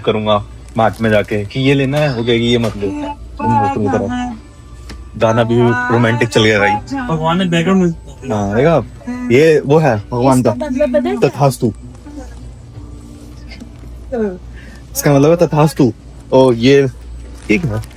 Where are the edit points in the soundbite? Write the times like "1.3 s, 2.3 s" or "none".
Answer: none